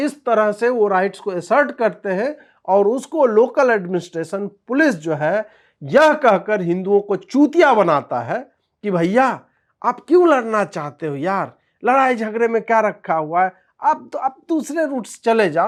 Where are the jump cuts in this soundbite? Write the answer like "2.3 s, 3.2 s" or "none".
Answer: none